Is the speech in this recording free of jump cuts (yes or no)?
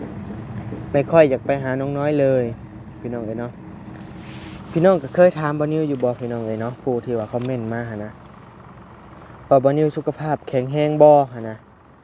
yes